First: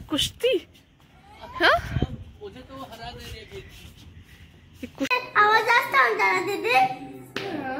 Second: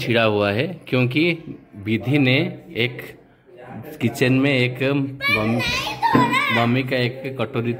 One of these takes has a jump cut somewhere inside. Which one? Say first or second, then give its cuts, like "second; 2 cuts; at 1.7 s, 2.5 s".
first; 1 cut; at 5.1 s